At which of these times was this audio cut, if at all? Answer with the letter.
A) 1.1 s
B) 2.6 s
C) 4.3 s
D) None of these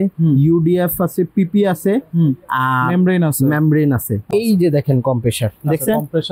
C